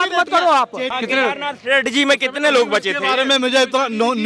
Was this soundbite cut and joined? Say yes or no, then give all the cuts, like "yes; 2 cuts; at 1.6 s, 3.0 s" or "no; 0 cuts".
yes; 1 cut; at 1.0 s